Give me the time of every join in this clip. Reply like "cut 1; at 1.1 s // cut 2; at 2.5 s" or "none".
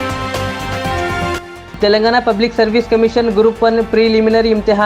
cut 1; at 1.3 s

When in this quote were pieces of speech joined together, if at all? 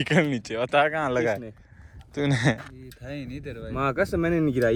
none

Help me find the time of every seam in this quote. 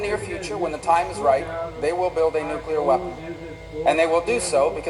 none

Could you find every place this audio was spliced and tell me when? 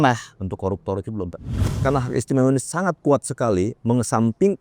cut 1; at 1.6 s

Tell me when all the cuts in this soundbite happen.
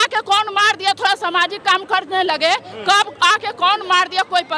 none

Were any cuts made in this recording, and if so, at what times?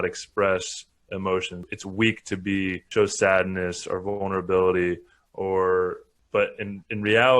cut 1; at 1.6 s // cut 2; at 2.8 s // cut 3; at 6.1 s

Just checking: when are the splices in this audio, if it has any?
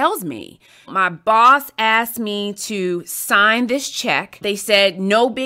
cut 1; at 0.9 s // cut 2; at 4.4 s

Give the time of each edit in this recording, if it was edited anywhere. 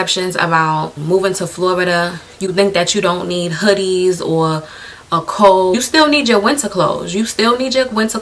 cut 1; at 0.9 s // cut 2; at 5.7 s

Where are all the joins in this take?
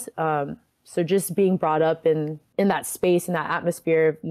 cut 1; at 2.5 s

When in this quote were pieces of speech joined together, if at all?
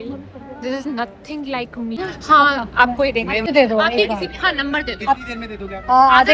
cut 1; at 2.0 s // cut 2; at 3.5 s

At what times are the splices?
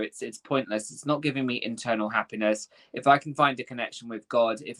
none

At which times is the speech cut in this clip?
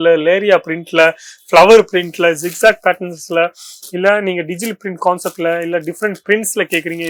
none

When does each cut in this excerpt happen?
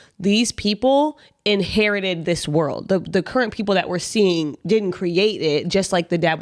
none

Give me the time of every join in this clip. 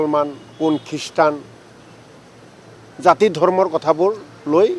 none

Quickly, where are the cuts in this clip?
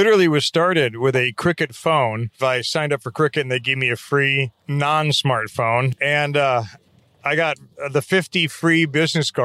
cut 1; at 2.3 s // cut 2; at 4.6 s // cut 3; at 5.9 s

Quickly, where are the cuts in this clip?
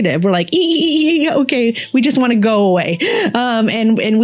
none

